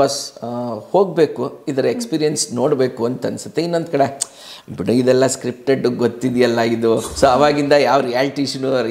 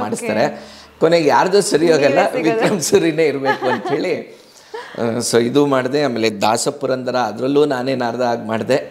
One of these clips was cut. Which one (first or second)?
first